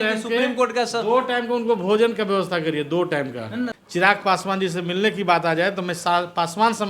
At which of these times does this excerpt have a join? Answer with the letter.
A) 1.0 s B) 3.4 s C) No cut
B